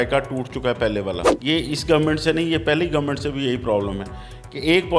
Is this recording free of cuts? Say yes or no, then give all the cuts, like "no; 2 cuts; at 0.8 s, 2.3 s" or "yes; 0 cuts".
no; 1 cut; at 1.3 s